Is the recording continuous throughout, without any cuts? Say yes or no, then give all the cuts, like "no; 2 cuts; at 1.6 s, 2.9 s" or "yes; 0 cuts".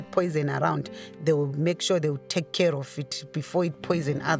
yes; 0 cuts